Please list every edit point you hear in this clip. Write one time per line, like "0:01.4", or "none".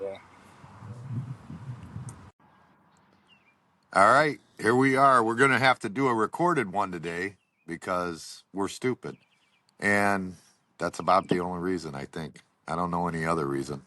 0:02.3